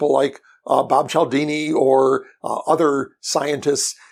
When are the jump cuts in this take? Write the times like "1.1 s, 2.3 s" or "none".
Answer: none